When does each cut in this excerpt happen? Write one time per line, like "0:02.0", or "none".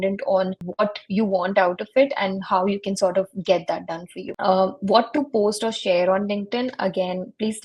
none